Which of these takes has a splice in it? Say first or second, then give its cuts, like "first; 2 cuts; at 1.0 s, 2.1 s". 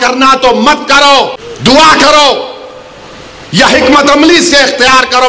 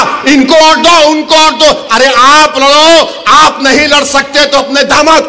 first; 1 cut; at 1.4 s